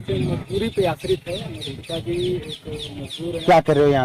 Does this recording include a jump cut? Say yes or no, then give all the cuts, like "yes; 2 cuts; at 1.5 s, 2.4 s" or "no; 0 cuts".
no; 0 cuts